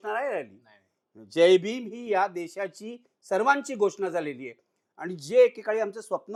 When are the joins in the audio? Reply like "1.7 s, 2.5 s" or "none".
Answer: none